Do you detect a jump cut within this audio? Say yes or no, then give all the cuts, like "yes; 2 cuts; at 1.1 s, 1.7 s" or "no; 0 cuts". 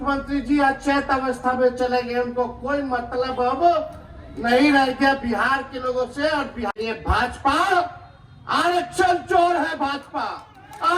yes; 1 cut; at 6.7 s